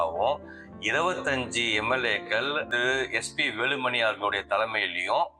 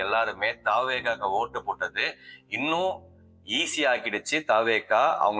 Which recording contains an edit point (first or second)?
first